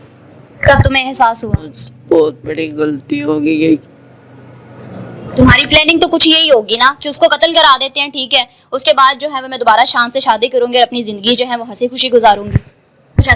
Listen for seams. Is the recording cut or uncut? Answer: uncut